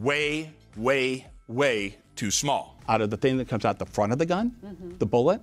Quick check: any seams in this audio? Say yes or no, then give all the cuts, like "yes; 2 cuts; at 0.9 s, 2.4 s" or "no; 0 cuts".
yes; 1 cut; at 2.7 s